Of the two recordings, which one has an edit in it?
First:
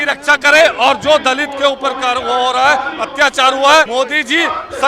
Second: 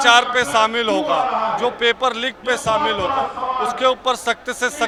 first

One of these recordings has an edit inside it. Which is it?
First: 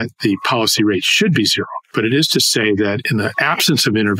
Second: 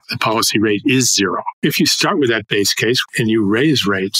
second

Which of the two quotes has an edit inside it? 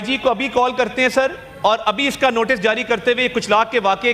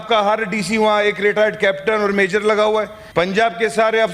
second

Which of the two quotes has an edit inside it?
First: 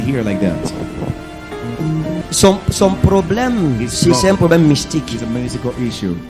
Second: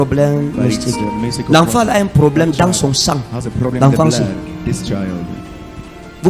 first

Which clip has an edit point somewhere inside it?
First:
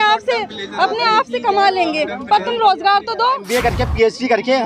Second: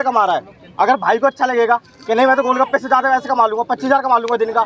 first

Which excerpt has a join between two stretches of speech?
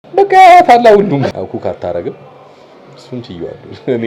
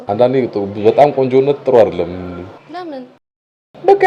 first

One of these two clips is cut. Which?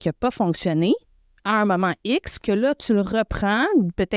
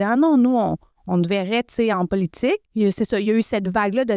second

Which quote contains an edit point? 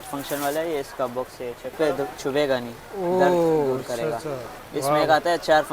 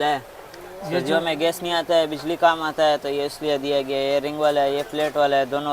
first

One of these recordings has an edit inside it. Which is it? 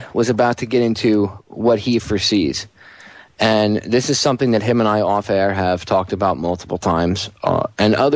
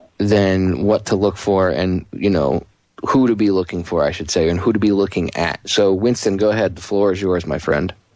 first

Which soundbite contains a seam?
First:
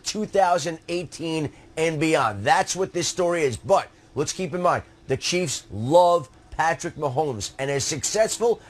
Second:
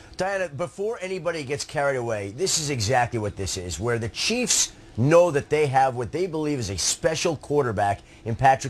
first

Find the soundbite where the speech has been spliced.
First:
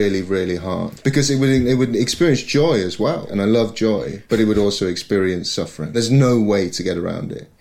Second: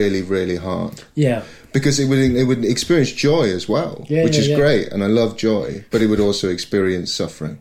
first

